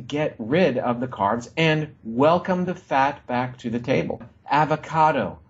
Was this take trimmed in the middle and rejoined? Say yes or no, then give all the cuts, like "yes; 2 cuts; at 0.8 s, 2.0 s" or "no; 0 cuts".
yes; 1 cut; at 4.3 s